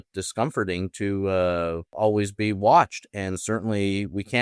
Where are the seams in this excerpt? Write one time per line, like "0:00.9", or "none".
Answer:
0:01.9